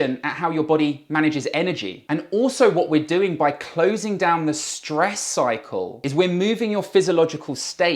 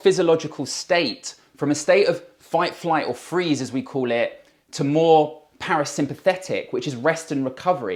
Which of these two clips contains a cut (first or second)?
first